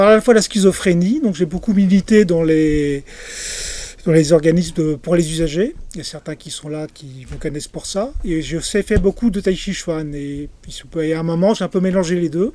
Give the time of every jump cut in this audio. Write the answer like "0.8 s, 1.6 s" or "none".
none